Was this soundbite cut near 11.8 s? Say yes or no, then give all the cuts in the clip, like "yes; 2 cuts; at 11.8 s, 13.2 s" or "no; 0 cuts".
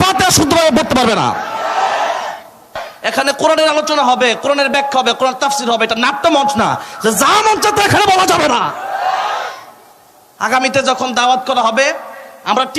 no; 1 cut; at 2.8 s